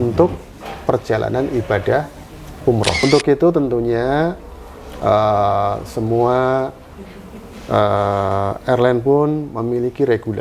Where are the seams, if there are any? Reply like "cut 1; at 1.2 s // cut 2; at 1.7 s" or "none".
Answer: cut 1; at 3.0 s